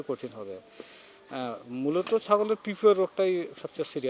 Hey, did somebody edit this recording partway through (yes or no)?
no